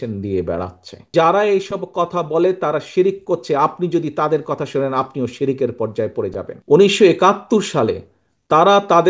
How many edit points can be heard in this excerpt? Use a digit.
2